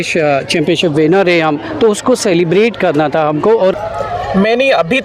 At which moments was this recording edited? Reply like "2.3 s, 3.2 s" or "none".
3.8 s